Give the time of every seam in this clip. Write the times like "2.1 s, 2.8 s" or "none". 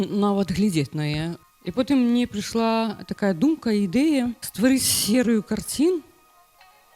1.4 s, 4.4 s